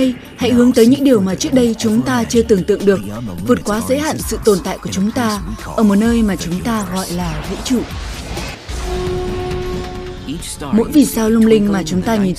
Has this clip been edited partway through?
no; 0 cuts

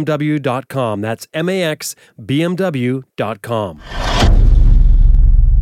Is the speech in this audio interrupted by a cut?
yes; 1 cut; at 3.8 s

